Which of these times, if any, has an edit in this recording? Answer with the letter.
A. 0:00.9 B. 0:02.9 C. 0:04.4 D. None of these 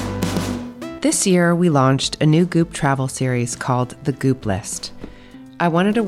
A